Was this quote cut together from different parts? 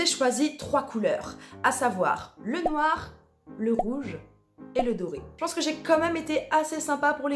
no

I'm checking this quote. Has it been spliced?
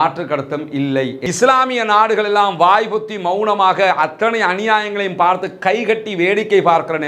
yes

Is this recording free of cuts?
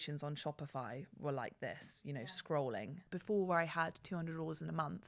no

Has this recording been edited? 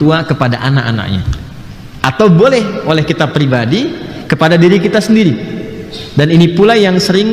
no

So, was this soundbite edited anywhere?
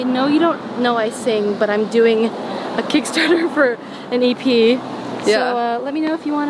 no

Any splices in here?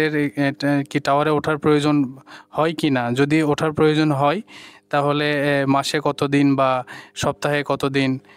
no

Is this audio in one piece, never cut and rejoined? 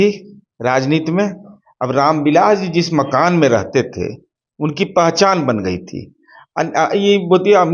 yes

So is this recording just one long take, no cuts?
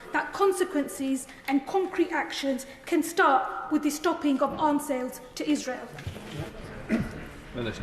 yes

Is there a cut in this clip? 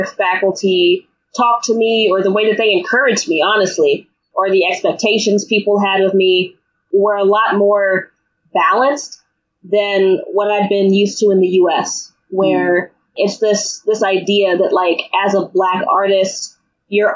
yes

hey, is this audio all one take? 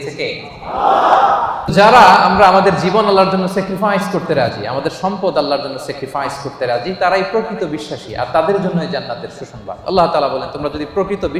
no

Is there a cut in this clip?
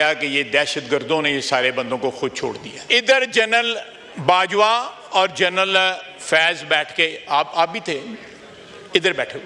yes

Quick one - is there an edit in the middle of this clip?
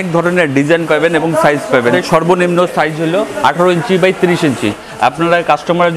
yes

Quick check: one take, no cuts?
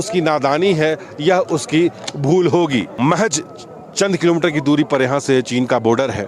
no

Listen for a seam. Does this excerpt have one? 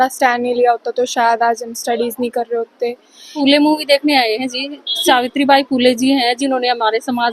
yes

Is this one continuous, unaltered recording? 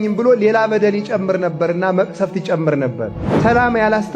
no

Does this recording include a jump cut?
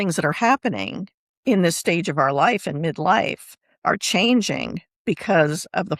no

